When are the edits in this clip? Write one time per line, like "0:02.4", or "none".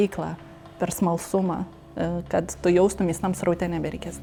none